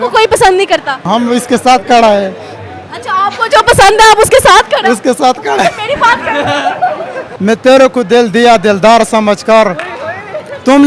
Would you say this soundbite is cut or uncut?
cut